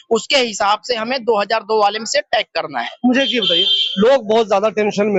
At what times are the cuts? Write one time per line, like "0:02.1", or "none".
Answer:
none